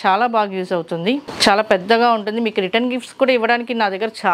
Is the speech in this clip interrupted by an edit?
yes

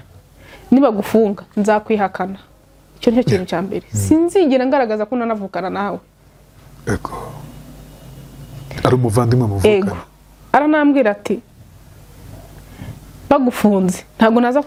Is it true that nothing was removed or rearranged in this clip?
yes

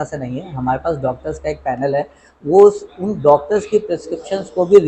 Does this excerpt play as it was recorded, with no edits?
yes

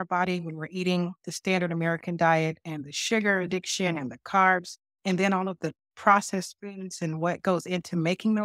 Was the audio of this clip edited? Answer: no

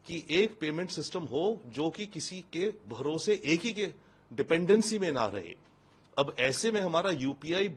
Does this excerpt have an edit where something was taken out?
no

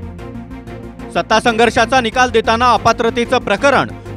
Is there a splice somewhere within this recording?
no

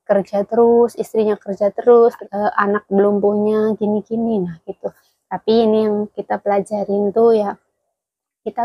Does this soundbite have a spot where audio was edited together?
yes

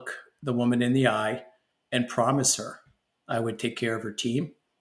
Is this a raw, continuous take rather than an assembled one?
yes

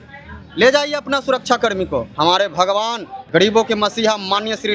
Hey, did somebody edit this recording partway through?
yes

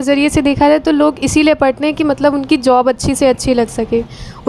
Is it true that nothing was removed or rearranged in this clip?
yes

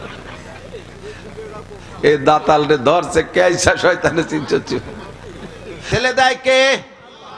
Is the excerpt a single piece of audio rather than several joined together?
no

